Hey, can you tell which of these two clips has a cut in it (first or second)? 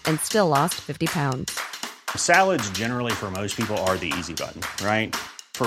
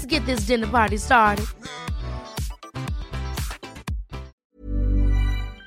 second